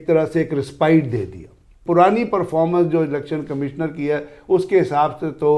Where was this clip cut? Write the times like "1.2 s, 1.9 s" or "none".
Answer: 1.8 s